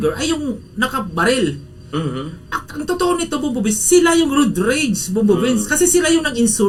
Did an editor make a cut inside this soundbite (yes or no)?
no